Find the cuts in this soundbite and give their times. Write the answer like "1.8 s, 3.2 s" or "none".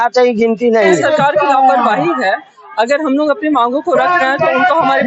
1.0 s